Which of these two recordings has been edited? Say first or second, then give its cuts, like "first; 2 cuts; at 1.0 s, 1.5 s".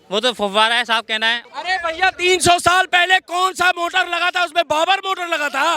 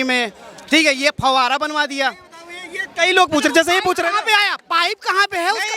first; 1 cut; at 1.4 s